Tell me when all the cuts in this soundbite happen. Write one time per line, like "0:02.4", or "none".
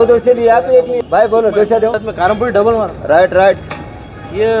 0:01.0
0:02.0